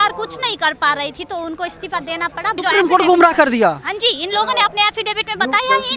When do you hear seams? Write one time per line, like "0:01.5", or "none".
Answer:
0:02.6